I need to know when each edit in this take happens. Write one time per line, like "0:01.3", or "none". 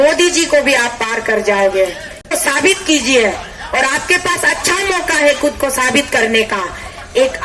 0:02.3